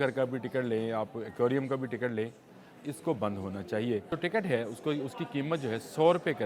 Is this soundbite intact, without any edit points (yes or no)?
no